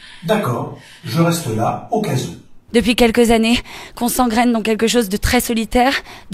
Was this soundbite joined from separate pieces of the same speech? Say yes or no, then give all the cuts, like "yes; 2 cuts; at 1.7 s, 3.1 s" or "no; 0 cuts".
yes; 1 cut; at 2.6 s